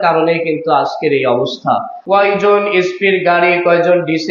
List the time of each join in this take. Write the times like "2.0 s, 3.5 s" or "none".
2.0 s

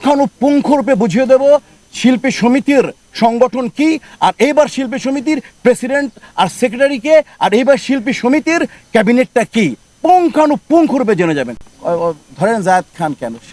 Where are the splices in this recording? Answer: 11.6 s

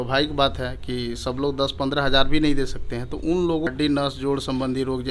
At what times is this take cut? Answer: 3.7 s

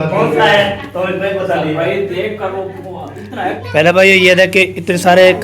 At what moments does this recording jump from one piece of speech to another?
3.6 s

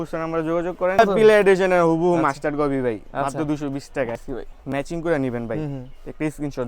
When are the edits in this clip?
1.0 s, 4.2 s

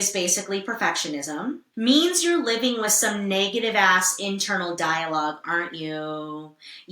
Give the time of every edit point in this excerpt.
1.7 s

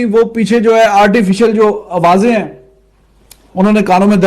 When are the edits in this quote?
1.1 s

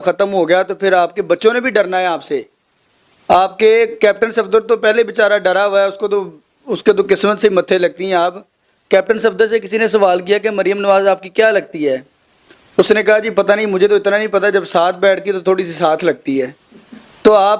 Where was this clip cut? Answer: none

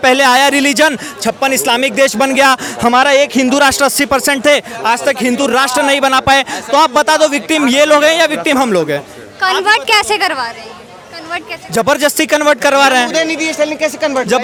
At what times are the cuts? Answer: none

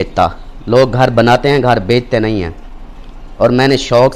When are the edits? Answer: none

